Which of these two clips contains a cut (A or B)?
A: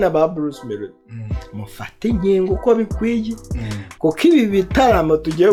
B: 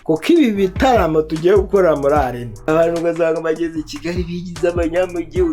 B